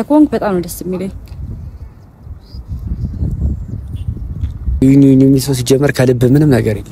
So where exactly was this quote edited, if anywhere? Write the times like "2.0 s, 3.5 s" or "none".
4.8 s